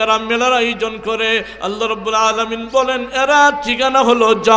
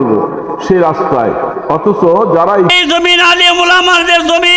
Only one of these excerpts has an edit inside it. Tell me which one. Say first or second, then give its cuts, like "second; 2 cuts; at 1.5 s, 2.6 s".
second; 1 cut; at 2.7 s